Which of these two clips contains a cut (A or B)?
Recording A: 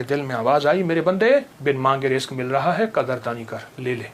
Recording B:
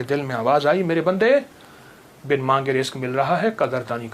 A